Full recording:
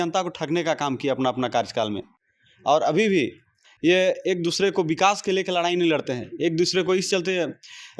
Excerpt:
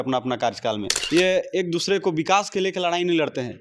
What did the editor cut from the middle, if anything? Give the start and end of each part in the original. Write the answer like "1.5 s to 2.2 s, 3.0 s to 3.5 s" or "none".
2.0 s to 3.6 s